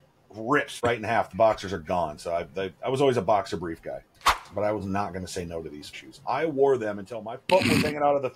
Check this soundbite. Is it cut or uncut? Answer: cut